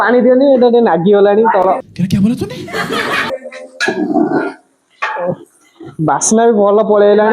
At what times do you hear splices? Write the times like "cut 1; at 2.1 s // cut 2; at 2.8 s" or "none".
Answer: none